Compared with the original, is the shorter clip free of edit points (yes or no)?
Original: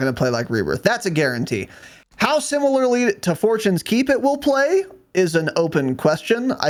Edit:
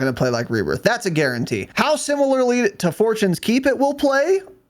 no